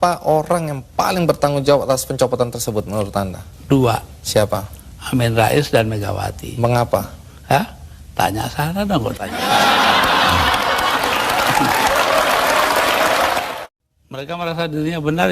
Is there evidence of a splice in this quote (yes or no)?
yes